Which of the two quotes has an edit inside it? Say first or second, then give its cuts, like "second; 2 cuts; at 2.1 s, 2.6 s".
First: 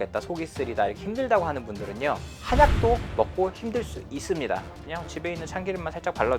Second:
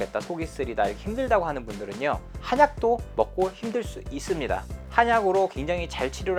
first; 1 cut; at 4.8 s